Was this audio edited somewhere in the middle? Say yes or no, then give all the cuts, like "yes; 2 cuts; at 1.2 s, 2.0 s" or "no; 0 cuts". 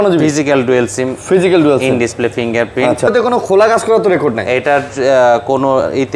yes; 1 cut; at 3.1 s